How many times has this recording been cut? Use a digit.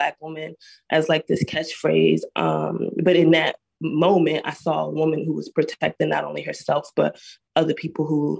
1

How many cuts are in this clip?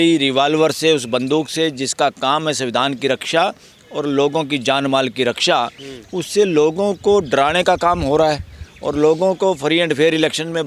0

